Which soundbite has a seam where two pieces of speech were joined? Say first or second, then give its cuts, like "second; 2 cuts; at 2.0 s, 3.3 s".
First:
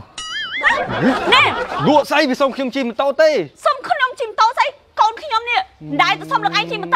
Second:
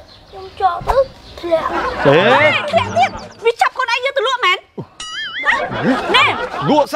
second; 2 cuts; at 1.3 s, 3.3 s